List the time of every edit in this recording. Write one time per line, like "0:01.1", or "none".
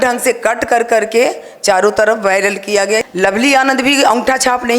0:03.1

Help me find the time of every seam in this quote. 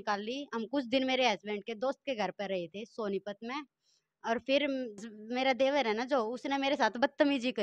0:05.1

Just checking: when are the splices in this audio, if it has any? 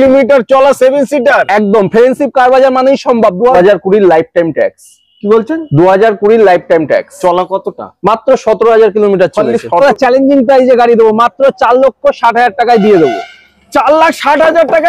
0:03.6
0:09.8

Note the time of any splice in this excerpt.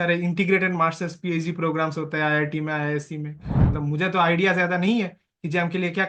0:03.6

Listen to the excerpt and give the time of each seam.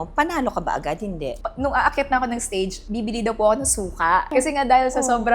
0:01.4
0:04.3

